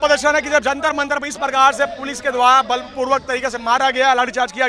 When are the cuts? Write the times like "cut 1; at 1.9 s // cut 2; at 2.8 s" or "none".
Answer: none